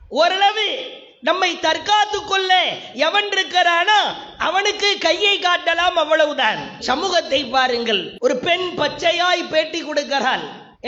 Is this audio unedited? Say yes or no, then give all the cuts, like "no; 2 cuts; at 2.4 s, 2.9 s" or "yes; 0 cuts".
no; 1 cut; at 8.1 s